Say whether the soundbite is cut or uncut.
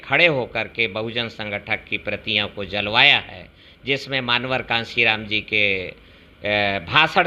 uncut